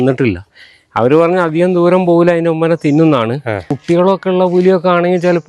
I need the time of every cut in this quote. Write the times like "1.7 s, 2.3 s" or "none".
3.7 s